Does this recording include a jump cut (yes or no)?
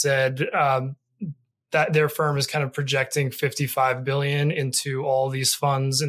no